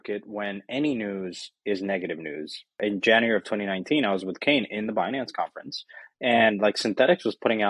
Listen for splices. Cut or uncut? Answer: cut